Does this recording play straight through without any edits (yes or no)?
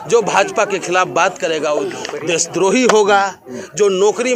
yes